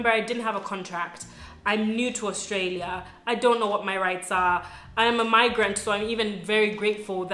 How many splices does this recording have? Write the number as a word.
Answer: zero